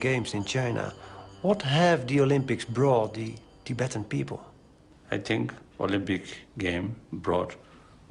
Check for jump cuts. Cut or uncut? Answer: cut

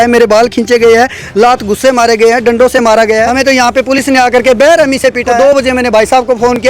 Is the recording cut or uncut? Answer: cut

